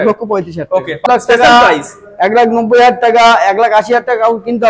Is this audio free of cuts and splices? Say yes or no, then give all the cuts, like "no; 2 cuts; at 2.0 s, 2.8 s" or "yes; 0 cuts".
no; 1 cut; at 1.0 s